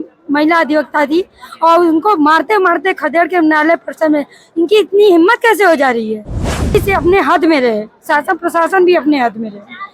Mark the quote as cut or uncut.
cut